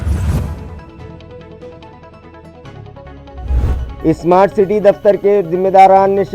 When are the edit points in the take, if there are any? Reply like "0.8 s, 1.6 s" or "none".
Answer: 4.0 s